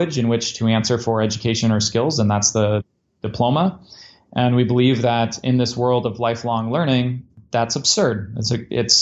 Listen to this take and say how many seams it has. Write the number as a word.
one